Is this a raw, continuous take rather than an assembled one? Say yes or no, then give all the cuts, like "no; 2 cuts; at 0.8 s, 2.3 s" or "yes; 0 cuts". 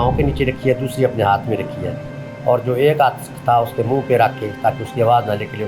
yes; 0 cuts